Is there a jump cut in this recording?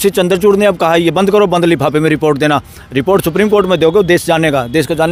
no; 0 cuts

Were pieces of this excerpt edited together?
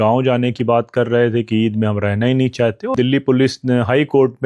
yes; 1 cut; at 2.9 s

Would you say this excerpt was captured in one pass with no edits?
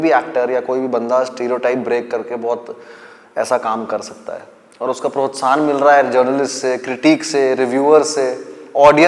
yes; 0 cuts

